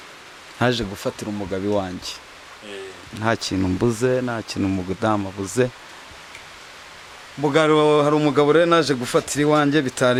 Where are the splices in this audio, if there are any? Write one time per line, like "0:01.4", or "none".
none